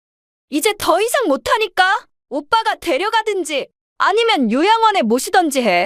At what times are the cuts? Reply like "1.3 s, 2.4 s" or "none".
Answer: 2.2 s, 3.8 s